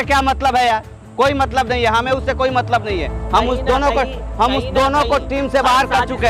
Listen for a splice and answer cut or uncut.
uncut